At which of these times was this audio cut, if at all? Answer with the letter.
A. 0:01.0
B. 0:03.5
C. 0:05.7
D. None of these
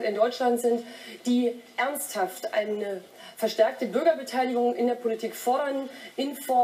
B